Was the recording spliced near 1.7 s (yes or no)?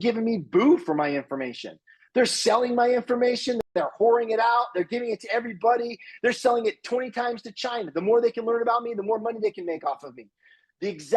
no